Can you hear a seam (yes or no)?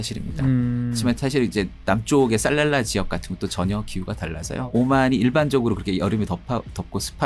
yes